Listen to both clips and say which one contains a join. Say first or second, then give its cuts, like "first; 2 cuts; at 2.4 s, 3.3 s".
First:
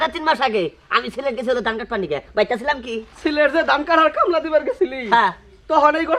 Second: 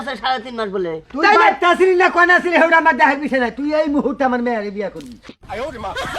second; 1 cut; at 5.1 s